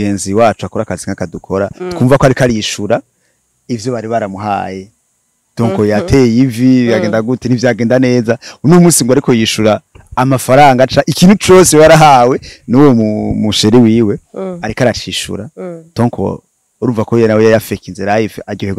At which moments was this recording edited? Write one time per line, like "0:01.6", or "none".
none